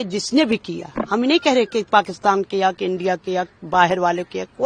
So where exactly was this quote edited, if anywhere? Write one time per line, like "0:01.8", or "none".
none